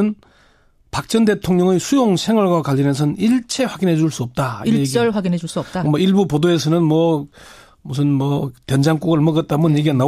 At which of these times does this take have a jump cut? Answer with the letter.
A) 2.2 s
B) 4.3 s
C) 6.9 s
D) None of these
C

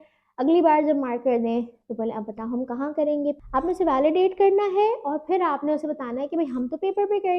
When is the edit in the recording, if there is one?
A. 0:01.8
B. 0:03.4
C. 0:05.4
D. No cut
B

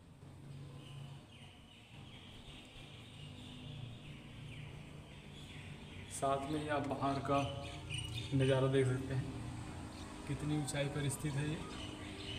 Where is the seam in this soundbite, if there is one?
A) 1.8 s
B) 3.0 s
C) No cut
C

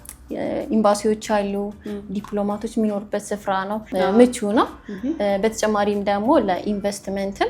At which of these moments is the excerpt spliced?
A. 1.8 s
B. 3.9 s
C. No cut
B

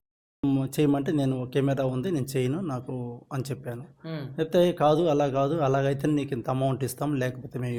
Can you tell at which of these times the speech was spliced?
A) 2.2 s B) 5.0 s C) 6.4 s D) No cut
D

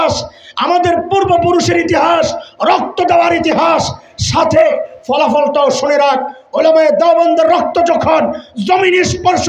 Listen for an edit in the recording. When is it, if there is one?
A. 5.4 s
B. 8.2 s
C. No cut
C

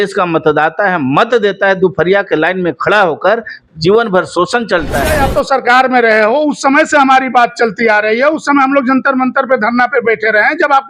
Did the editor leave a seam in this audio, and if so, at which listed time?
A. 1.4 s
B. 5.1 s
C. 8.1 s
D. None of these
B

